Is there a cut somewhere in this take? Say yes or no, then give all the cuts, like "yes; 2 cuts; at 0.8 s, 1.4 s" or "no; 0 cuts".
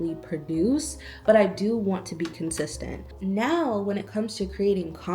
yes; 1 cut; at 3.0 s